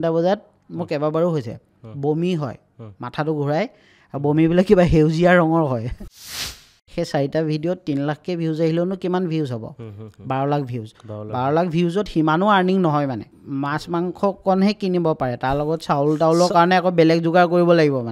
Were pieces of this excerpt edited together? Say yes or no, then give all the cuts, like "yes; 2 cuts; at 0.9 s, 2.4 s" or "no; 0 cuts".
yes; 2 cuts; at 6.3 s, 13.3 s